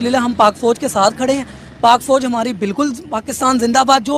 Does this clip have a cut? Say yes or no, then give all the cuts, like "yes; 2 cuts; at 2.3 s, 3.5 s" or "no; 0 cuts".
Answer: no; 0 cuts